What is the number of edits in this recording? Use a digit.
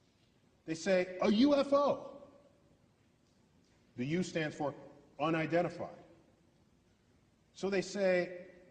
1